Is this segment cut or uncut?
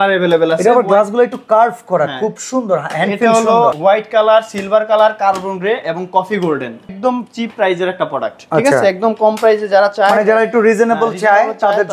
cut